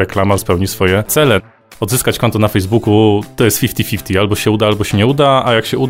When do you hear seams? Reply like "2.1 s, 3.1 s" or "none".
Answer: 1.5 s, 3.3 s